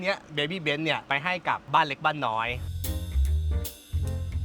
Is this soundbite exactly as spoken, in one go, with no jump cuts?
no; 2 cuts; at 1.6 s, 2.7 s

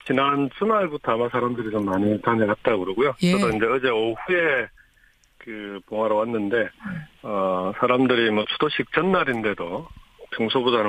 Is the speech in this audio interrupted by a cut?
no; 0 cuts

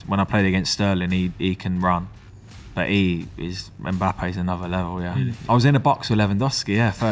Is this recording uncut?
no; 1 cut; at 5.4 s

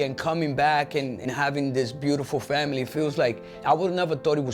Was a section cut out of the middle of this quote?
yes; 1 cut; at 3.5 s

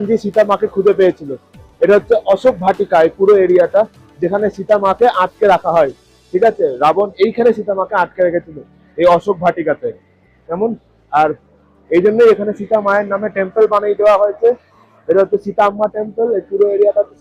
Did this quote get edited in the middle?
no; 0 cuts

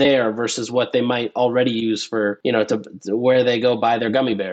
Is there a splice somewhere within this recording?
yes; 1 cut; at 2.4 s

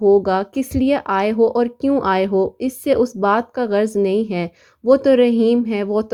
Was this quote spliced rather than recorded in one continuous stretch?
no; 0 cuts

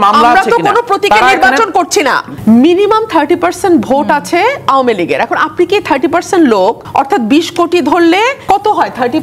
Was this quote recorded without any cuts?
no; 3 cuts; at 2.3 s, 6.8 s, 8.4 s

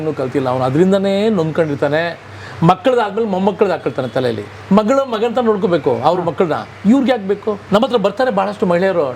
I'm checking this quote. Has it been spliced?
yes; 2 cuts; at 4.5 s, 7.6 s

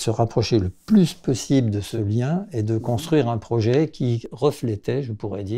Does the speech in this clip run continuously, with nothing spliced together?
no; 2 cuts; at 1.9 s, 4.3 s

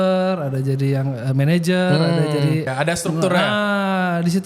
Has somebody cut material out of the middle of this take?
yes; 1 cut; at 2.7 s

